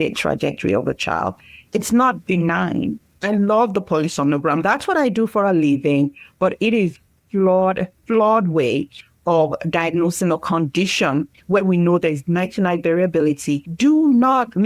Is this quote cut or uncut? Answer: cut